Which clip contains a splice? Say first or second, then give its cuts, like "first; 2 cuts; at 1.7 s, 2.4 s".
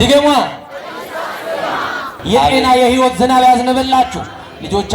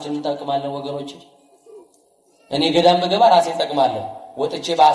first; 1 cut; at 2.5 s